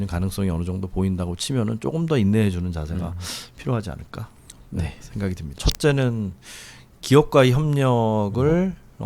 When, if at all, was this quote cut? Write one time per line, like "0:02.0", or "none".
0:05.5